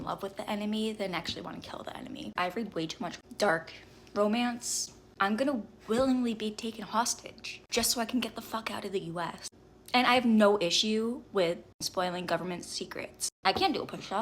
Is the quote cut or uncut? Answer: uncut